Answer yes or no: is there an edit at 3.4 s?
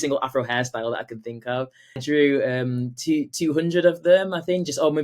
no